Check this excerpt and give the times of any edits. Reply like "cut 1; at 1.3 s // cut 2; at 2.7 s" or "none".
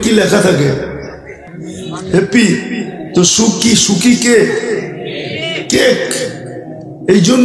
none